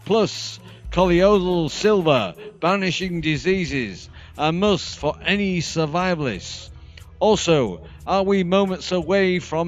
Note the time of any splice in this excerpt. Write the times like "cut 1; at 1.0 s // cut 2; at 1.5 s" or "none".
cut 1; at 3.0 s